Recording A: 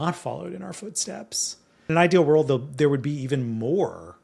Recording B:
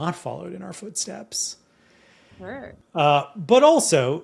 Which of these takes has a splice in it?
A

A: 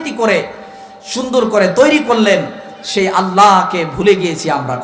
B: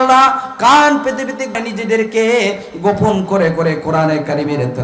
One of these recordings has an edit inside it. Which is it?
B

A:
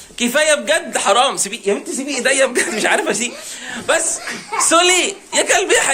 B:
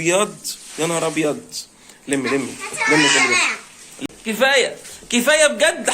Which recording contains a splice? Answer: B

